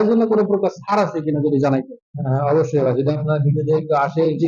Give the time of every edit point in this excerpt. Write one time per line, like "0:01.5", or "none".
none